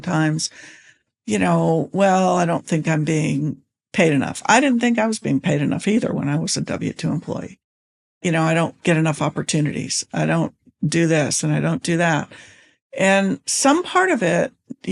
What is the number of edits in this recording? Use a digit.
0